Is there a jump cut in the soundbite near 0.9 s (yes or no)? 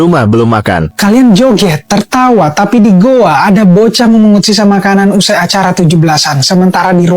yes